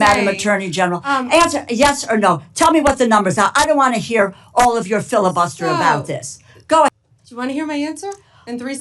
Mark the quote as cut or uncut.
cut